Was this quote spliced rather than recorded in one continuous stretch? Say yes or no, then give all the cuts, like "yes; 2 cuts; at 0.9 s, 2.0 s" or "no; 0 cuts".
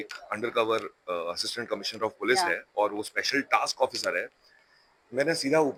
no; 0 cuts